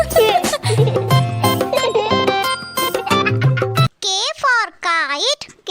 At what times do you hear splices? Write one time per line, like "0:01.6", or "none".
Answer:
0:03.9